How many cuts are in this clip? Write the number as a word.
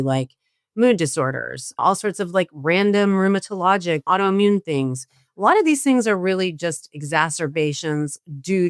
zero